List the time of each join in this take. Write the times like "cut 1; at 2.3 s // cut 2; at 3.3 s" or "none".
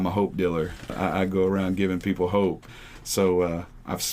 cut 1; at 0.9 s // cut 2; at 2.7 s